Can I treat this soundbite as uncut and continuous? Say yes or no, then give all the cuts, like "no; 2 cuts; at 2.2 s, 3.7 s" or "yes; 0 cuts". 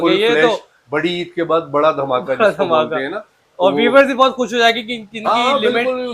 yes; 0 cuts